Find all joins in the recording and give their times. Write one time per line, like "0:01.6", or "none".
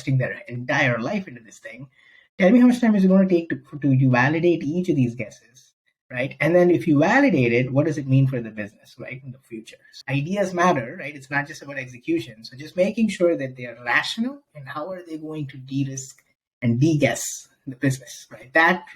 0:09.8